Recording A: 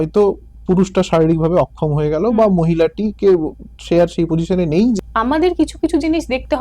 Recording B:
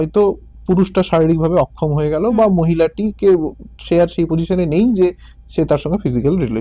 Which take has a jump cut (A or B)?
A